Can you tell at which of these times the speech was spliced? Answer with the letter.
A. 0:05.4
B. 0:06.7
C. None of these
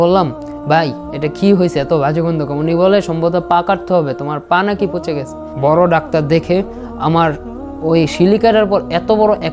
A